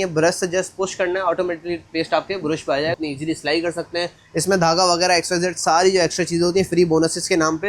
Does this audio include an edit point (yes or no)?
yes